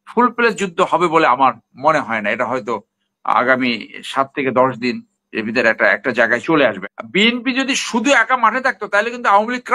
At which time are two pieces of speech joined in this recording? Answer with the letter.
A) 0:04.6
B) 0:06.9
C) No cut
B